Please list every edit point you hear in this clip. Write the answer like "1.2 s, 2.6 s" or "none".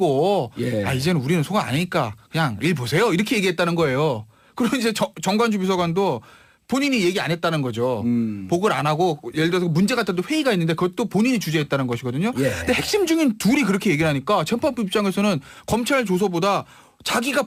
none